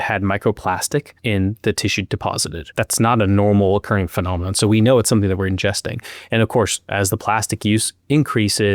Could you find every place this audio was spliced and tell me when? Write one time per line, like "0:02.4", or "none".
0:01.1
0:02.6